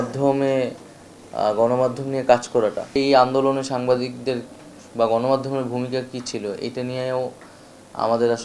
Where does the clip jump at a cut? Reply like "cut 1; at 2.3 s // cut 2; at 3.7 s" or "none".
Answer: cut 1; at 3.0 s